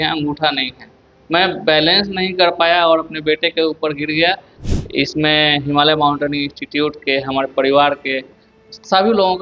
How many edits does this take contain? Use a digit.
1